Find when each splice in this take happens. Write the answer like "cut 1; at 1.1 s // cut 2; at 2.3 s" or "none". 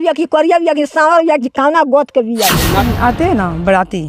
cut 1; at 2.8 s